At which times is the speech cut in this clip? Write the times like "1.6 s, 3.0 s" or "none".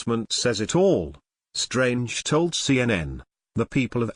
2.9 s